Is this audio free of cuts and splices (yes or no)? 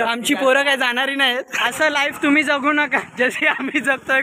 no